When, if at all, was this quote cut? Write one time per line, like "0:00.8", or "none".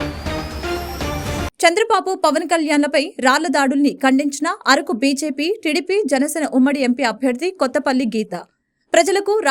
none

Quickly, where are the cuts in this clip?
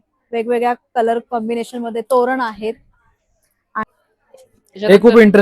0:03.8

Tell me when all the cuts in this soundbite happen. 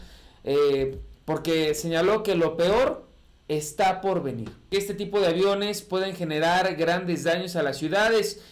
0:04.6

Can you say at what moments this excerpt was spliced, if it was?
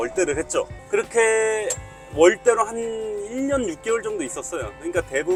none

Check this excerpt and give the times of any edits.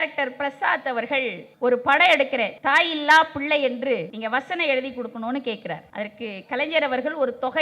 0:01.4
0:02.5
0:04.1
0:05.8

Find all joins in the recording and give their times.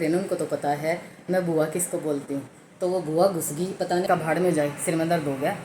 0:04.0

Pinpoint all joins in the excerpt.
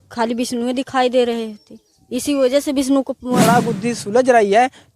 0:03.4

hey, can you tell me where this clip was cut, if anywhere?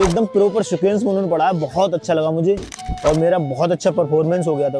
none

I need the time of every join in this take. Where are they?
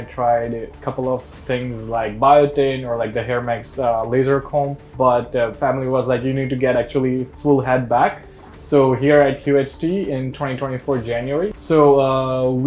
0:11.6

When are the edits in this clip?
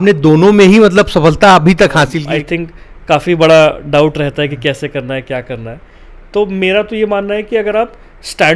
0:02.2

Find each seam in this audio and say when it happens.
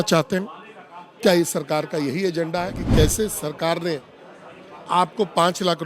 0:02.8

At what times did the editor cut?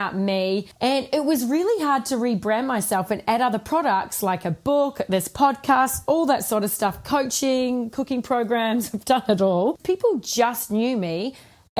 0:09.8

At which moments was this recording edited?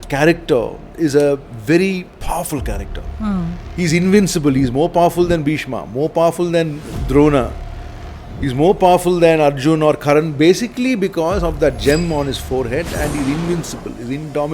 0:02.1

